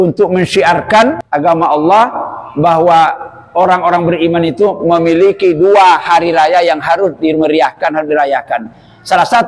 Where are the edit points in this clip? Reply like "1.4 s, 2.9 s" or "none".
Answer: 1.2 s